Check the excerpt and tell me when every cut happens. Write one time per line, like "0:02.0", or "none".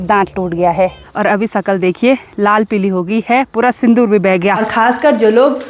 0:01.0
0:04.7